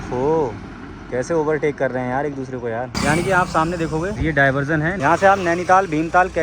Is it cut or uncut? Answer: cut